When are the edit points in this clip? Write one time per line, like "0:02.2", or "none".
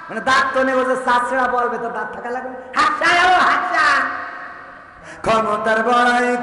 0:05.1